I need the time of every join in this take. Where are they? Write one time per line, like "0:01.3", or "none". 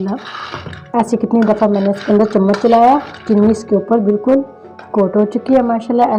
none